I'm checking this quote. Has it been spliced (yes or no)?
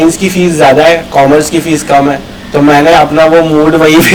no